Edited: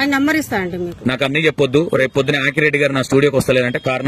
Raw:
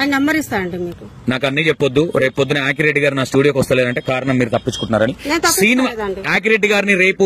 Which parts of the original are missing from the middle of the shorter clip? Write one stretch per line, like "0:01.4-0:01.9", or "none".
0:00.9-0:01.1